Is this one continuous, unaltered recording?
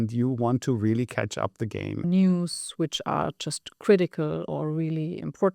no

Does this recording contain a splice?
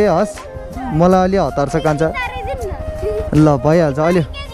no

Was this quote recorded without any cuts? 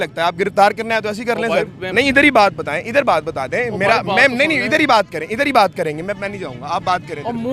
no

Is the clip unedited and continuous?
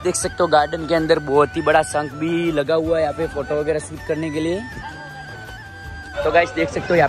yes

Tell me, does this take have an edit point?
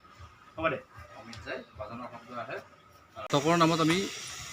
yes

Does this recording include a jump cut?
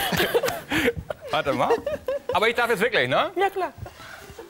no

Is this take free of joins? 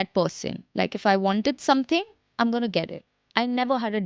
yes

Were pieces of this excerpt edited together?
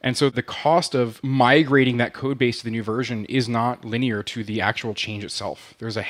no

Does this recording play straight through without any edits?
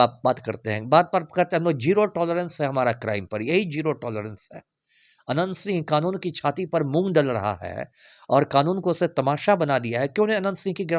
yes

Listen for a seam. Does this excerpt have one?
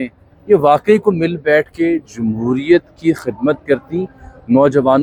no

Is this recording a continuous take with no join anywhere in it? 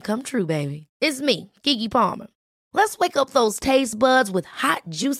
yes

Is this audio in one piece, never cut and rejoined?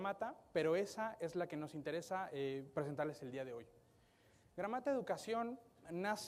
no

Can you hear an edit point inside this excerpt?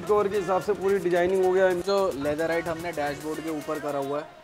yes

